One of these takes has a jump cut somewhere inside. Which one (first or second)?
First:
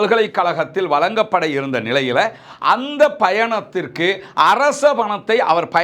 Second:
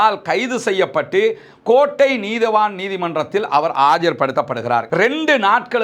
second